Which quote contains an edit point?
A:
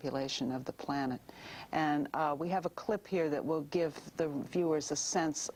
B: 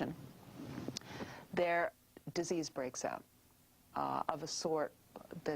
B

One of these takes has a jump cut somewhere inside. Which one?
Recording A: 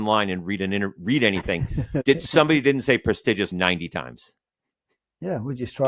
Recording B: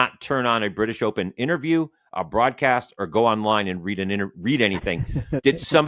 A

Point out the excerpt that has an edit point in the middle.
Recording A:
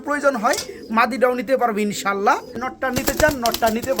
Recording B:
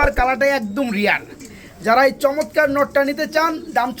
A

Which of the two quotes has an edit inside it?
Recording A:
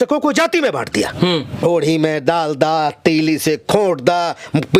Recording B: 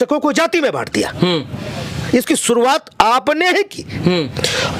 A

